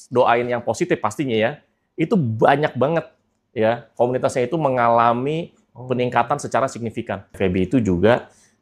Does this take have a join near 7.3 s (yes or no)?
yes